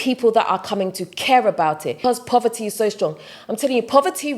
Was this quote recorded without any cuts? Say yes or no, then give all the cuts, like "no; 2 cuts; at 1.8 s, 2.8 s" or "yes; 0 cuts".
no; 1 cut; at 2.0 s